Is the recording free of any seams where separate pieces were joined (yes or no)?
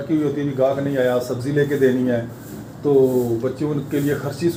yes